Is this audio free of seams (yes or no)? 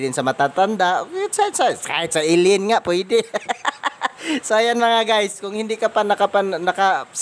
no